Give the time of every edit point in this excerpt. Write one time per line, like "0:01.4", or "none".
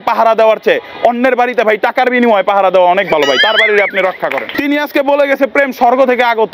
0:04.5

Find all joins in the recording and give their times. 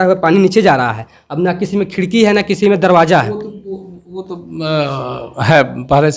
none

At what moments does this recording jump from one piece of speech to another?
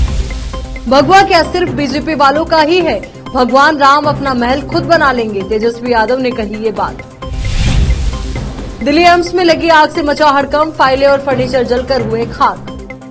none

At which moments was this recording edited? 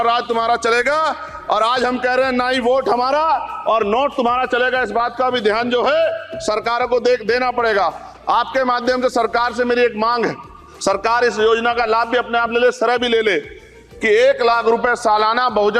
none

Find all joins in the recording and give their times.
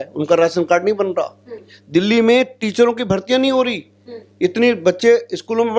none

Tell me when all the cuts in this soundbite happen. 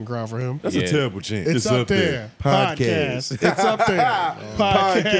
0:01.4

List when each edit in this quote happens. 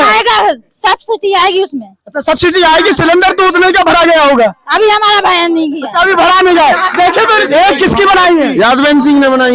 0:07.4

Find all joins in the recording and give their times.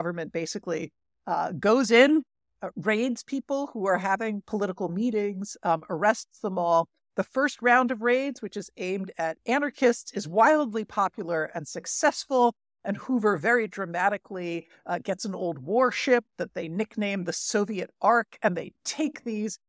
none

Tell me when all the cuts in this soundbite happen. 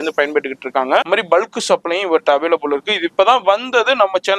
0:01.1

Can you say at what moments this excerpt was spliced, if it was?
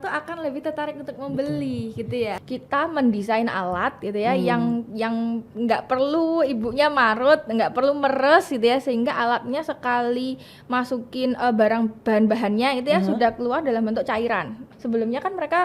0:02.4
0:14.6

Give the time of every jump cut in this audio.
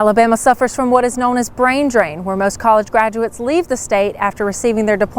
none

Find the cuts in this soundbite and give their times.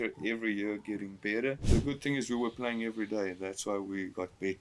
0:01.6

